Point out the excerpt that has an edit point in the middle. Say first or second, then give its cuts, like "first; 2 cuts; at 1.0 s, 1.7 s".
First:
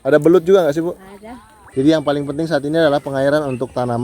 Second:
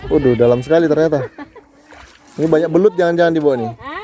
first; 1 cut; at 1.6 s